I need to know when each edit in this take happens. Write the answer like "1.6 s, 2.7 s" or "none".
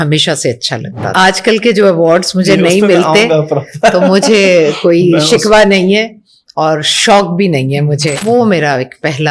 1.1 s, 8.2 s